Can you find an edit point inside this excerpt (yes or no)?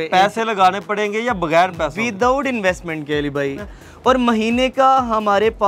yes